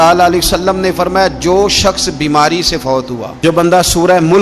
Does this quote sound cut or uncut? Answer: cut